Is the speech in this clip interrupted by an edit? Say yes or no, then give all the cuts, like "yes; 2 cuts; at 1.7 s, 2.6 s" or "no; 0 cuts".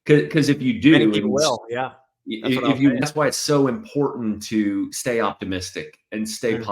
yes; 1 cut; at 3.0 s